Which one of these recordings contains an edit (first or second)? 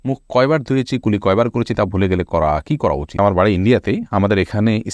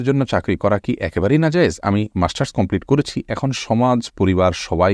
first